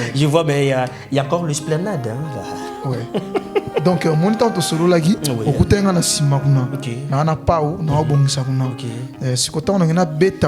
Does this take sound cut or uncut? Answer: uncut